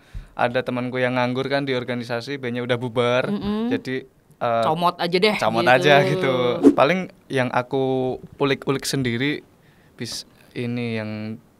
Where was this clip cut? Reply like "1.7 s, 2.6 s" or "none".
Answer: 6.7 s